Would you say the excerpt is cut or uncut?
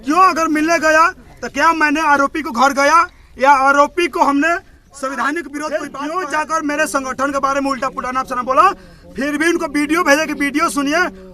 cut